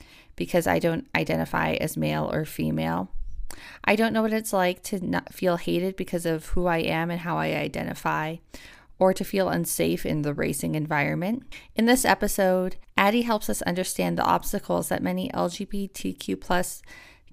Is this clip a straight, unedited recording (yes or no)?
no